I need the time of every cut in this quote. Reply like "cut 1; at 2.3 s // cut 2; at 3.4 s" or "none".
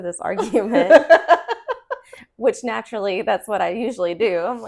none